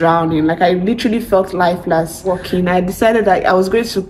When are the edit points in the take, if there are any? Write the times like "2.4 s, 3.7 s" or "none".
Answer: 2.3 s